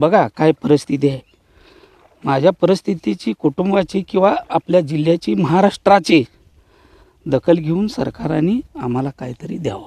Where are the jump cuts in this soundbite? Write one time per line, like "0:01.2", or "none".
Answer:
none